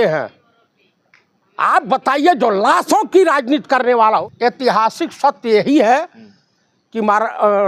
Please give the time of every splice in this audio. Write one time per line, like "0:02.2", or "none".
0:04.3